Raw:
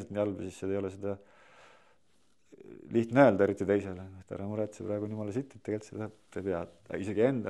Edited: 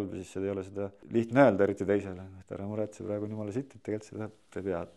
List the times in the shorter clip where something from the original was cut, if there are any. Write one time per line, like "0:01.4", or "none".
0:01.0